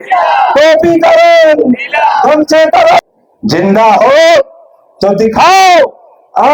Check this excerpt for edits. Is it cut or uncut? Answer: cut